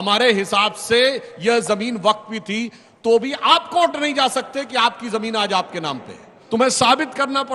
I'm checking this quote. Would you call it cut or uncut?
cut